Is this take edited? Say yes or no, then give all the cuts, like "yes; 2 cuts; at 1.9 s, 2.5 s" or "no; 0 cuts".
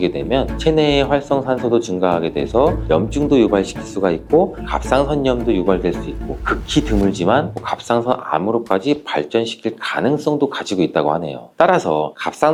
no; 0 cuts